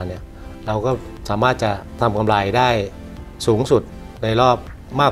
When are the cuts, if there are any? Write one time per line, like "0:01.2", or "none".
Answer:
0:01.9